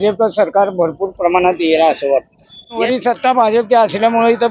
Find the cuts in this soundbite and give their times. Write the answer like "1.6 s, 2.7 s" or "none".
2.8 s